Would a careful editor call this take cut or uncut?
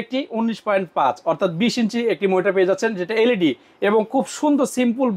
uncut